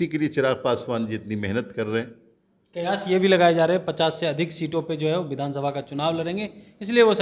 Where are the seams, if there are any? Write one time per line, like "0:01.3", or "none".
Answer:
none